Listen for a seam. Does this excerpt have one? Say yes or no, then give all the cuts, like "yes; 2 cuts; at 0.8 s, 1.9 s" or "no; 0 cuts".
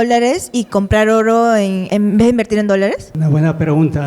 yes; 2 cuts; at 1.8 s, 3.1 s